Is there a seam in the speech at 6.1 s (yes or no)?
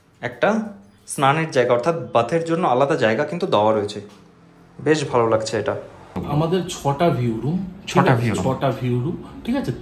yes